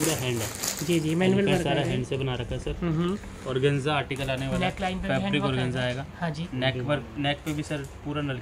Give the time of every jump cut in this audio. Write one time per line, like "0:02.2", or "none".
none